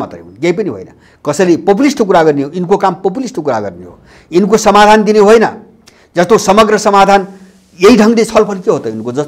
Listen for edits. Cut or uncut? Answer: uncut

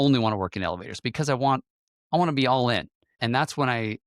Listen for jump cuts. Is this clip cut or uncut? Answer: cut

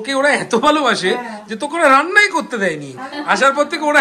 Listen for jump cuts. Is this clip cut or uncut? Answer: uncut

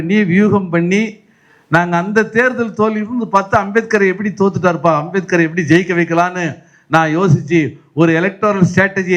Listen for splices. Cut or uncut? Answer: uncut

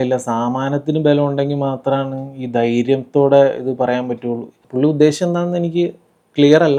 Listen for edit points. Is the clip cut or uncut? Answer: uncut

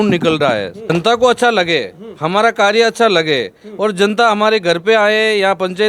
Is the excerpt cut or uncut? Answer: cut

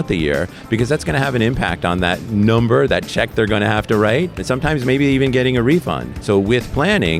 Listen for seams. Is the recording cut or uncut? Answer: cut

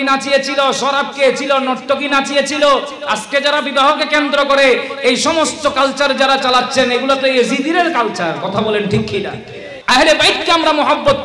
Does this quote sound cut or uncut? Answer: cut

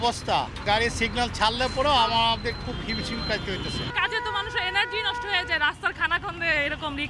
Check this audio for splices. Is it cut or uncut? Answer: uncut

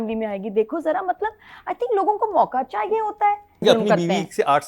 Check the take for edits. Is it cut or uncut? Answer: cut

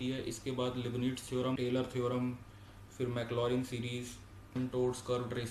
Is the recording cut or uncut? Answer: cut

